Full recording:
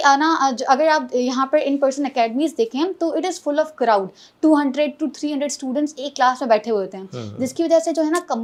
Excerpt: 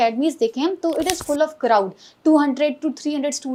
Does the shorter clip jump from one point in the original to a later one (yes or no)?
no